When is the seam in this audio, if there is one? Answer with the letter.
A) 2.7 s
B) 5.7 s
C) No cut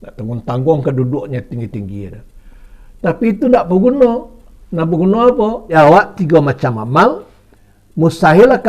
B